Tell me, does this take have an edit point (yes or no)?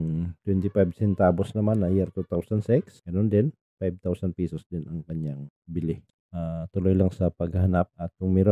yes